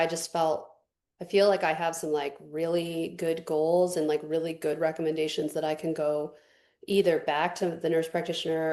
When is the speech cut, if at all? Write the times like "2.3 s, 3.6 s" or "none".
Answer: none